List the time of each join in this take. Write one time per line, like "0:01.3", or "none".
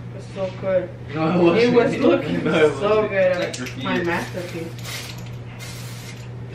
0:03.6